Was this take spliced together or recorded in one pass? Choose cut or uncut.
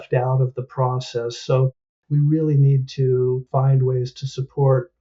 cut